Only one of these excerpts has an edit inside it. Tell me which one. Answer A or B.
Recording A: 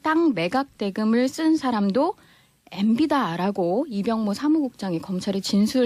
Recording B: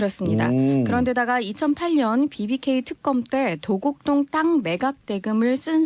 B